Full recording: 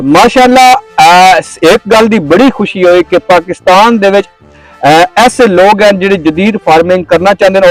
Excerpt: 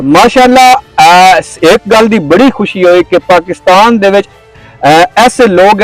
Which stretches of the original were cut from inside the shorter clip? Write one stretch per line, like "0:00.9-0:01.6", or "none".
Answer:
none